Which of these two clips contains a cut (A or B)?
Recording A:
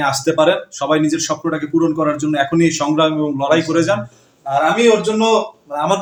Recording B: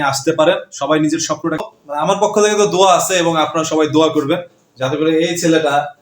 B